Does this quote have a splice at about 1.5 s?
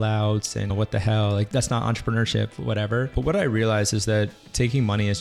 yes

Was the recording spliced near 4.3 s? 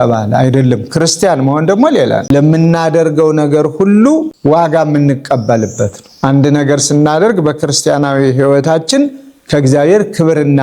no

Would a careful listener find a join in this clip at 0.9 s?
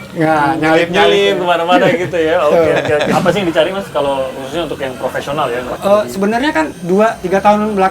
no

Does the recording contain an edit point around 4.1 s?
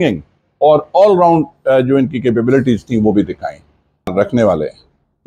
yes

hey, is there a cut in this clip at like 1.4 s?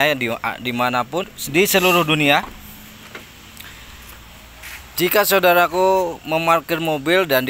yes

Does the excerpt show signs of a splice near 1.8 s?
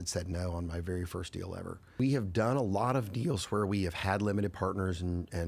yes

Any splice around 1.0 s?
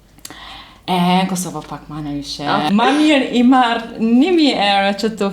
no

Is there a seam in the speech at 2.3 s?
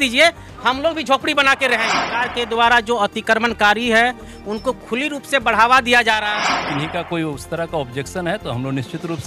yes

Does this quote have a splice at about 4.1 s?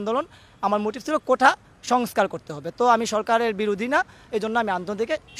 no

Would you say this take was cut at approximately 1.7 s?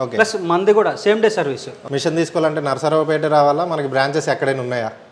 yes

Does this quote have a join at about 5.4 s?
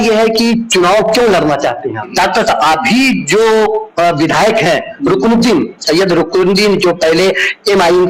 no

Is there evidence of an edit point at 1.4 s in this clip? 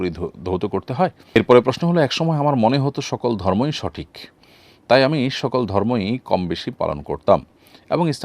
yes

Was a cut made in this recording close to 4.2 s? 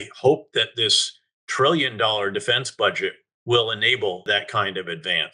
yes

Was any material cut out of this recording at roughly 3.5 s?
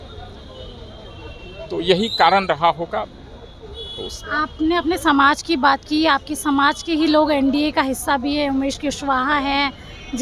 no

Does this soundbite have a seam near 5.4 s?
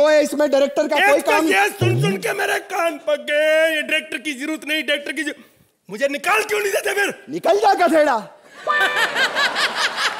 no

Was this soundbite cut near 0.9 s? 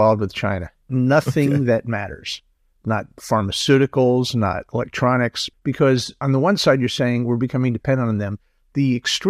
yes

